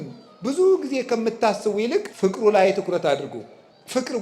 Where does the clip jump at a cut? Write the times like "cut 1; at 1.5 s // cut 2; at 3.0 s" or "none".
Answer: cut 1; at 2.1 s